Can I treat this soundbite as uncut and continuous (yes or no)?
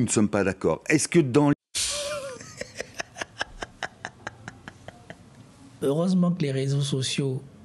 no